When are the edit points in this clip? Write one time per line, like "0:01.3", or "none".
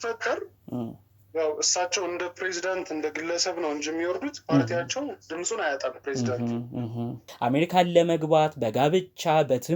0:07.3